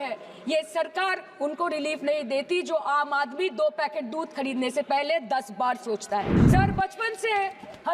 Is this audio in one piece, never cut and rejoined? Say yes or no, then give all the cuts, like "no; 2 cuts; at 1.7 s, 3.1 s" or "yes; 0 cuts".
no; 1 cut; at 6.4 s